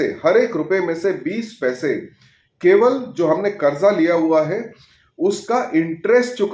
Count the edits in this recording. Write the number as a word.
zero